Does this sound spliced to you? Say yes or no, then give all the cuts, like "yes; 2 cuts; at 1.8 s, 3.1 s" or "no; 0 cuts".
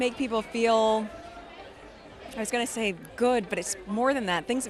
no; 0 cuts